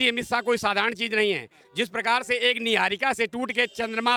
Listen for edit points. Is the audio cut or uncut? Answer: uncut